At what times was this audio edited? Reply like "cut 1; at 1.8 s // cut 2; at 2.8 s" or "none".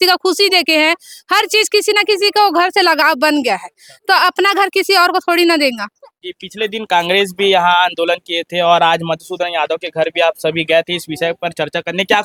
none